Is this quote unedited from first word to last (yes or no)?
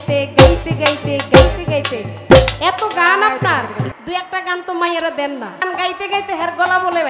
no